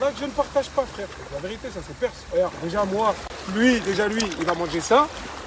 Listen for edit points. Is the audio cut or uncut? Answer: cut